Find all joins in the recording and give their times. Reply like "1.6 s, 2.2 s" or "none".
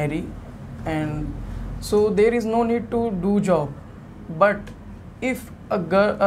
none